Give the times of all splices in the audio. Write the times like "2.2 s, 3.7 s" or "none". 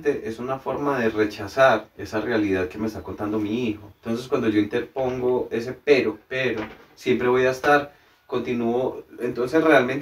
2.0 s, 3.9 s, 6.3 s